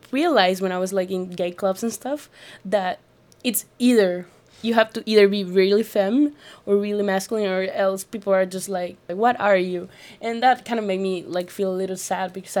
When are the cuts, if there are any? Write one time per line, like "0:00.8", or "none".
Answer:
0:09.1